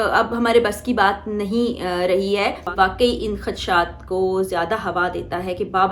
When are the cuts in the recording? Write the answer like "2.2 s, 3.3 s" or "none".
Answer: 2.7 s